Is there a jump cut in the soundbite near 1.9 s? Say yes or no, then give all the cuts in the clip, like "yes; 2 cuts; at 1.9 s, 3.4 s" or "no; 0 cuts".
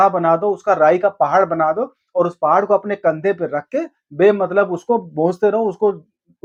no; 0 cuts